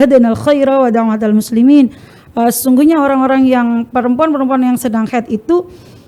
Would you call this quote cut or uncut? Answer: uncut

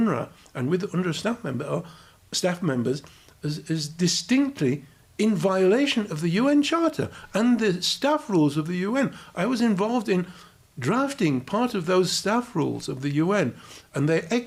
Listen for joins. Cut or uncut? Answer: uncut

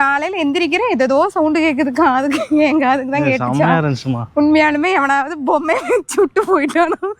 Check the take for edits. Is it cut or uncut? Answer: uncut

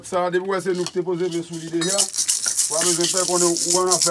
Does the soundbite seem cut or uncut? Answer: uncut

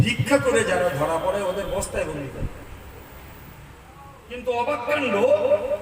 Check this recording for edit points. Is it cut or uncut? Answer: cut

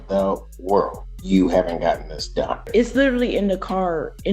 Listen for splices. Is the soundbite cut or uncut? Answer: cut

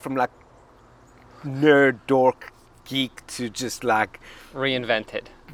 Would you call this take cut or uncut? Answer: uncut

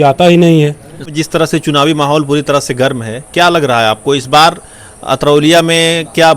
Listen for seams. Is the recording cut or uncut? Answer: cut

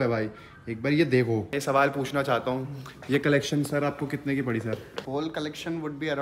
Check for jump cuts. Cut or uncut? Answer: cut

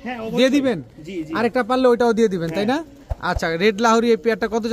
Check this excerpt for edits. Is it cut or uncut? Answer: uncut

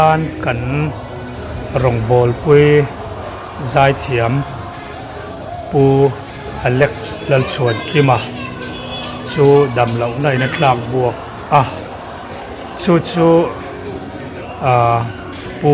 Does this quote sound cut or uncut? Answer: uncut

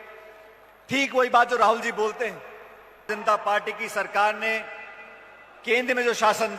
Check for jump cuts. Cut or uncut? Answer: cut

